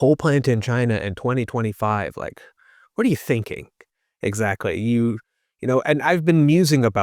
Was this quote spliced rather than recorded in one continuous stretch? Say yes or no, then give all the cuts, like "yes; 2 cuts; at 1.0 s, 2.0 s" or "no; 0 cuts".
no; 0 cuts